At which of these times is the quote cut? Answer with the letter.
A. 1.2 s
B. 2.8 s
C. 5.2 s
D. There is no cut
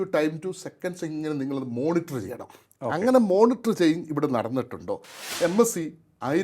C